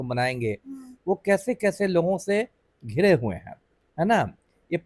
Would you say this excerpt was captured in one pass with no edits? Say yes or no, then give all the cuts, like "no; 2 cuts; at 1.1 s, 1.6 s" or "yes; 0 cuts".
yes; 0 cuts